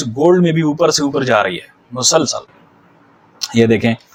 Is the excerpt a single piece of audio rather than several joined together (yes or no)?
yes